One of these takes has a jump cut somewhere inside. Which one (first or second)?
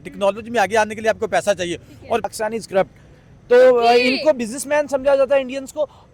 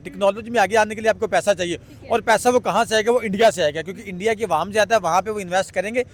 first